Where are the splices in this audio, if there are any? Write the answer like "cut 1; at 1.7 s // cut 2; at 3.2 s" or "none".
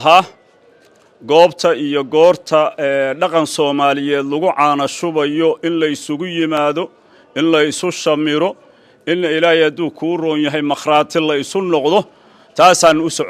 none